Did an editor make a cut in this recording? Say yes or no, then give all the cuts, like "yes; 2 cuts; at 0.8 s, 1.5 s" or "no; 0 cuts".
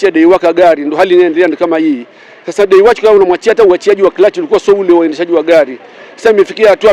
no; 0 cuts